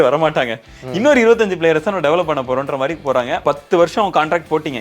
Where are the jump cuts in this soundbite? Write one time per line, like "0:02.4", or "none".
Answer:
0:03.4